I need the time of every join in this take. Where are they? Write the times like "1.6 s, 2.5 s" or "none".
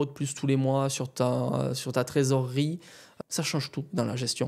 3.1 s